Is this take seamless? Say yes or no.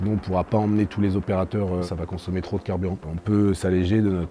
no